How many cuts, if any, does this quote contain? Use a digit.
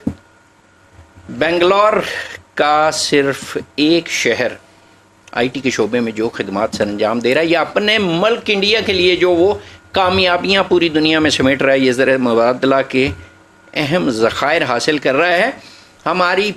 0